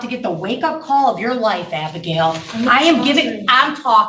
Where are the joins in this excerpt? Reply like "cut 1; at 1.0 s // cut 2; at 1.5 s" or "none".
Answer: none